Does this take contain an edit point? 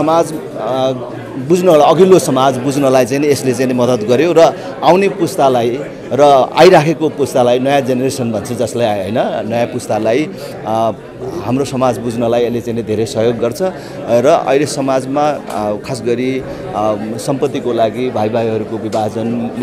no; 0 cuts

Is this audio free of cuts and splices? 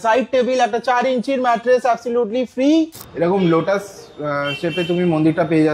no; 1 cut; at 3.0 s

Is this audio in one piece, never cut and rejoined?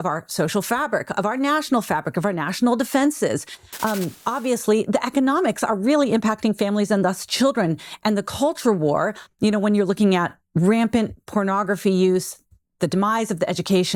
yes; 0 cuts

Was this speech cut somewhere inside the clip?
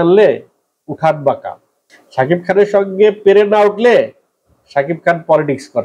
no; 0 cuts

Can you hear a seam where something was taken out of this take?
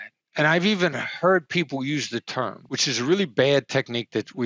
yes; 1 cut; at 2.6 s

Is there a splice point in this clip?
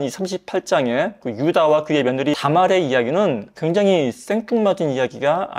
yes; 1 cut; at 3.5 s

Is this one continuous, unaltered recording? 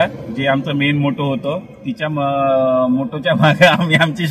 yes; 0 cuts

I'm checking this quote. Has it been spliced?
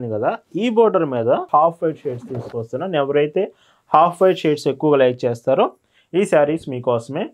yes; 1 cut; at 1.5 s

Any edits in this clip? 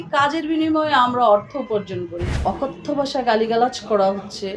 yes; 1 cut; at 2.3 s

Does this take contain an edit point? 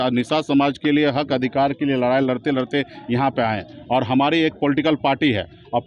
no; 0 cuts

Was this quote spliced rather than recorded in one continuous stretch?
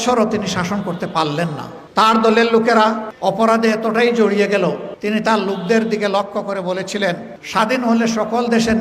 yes; 4 cuts; at 1.7 s, 3.1 s, 4.9 s, 7.3 s

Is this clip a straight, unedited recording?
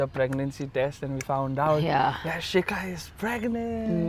yes; 0 cuts

